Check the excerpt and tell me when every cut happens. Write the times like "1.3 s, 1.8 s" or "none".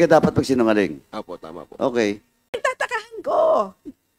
2.5 s